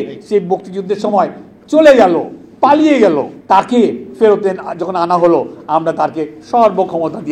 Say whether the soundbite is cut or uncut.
cut